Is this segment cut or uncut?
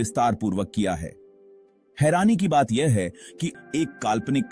cut